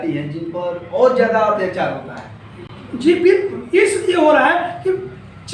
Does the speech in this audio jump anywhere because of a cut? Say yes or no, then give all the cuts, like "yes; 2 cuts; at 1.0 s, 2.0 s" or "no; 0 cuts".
no; 0 cuts